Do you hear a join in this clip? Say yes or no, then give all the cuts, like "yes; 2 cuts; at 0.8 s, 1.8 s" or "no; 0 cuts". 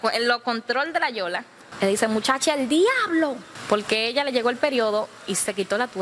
yes; 2 cuts; at 1.6 s, 3.5 s